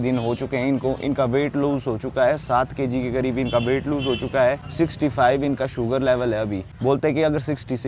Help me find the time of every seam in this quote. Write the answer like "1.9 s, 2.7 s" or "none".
none